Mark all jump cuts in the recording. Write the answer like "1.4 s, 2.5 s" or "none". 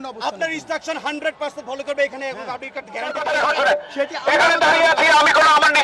3.2 s